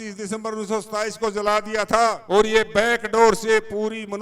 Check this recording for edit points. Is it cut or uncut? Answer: cut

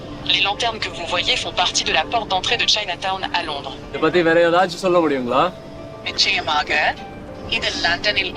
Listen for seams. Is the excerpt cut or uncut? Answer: cut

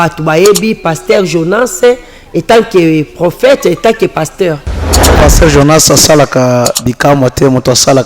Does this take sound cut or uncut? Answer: cut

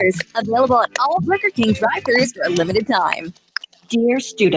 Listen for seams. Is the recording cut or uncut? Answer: cut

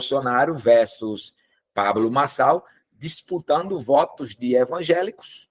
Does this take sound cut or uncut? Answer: uncut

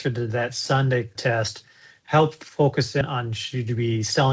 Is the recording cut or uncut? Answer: cut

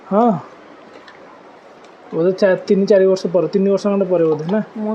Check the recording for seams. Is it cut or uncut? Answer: uncut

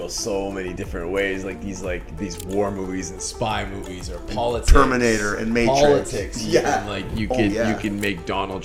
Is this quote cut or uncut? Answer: uncut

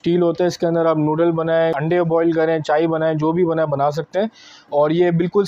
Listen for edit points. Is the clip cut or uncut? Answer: uncut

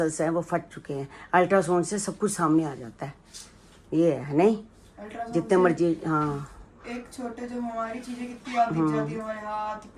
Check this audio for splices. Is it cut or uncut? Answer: uncut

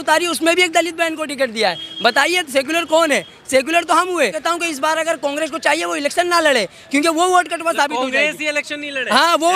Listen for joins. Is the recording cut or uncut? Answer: cut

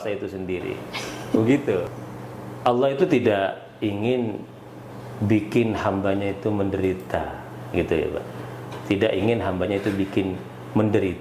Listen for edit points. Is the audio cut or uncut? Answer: cut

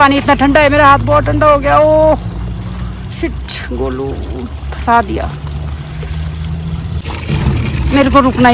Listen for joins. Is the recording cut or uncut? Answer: uncut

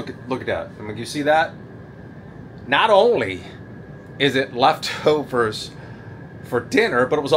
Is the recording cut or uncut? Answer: uncut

